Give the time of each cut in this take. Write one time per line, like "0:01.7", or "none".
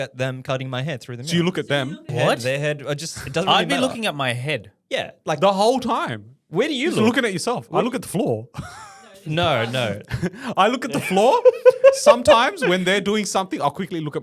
0:02.1